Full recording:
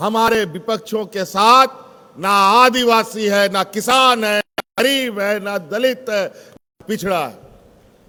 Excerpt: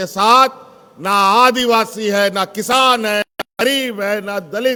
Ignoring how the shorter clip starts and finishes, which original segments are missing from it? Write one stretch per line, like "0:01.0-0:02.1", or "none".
none